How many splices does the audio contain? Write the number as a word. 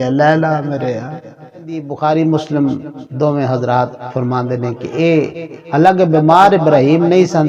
one